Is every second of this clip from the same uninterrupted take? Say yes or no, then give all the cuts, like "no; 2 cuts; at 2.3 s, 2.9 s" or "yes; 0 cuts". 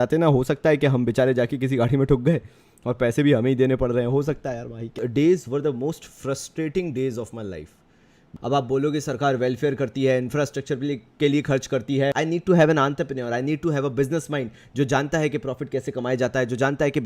no; 3 cuts; at 4.9 s, 8.3 s, 12.2 s